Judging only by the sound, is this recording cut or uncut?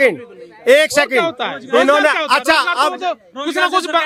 uncut